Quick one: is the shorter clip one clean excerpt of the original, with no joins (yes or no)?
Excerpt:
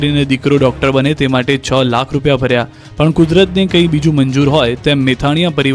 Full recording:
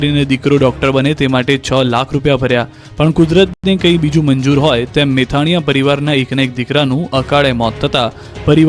no